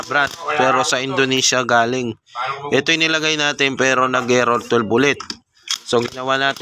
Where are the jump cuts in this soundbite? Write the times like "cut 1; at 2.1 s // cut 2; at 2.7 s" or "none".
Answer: none